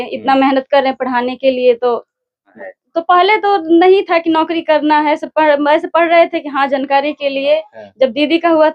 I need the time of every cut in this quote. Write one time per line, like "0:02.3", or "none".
0:02.5